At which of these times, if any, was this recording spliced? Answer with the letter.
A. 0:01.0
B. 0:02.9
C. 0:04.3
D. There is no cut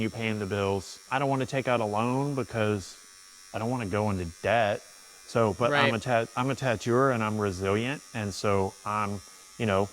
A